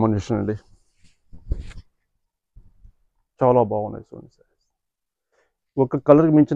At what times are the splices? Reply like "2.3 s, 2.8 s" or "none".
none